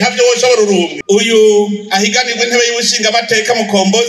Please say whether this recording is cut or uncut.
cut